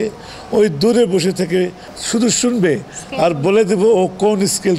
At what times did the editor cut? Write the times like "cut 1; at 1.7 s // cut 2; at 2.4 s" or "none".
cut 1; at 1.9 s